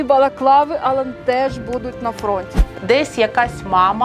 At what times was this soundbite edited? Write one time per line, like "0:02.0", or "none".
0:02.6